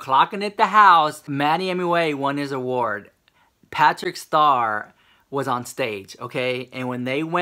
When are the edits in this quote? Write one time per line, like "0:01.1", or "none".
0:01.2